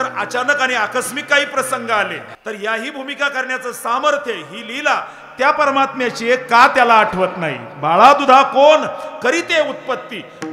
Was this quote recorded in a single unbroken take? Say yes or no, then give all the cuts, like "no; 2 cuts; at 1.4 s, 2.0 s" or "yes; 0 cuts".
no; 1 cut; at 2.3 s